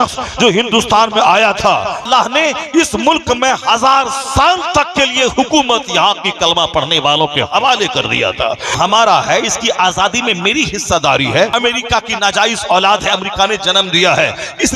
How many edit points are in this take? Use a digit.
3